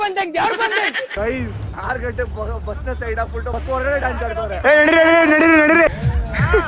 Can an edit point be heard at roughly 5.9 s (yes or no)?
yes